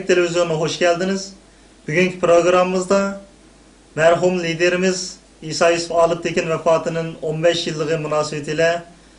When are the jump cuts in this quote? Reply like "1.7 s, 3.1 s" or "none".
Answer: 8.3 s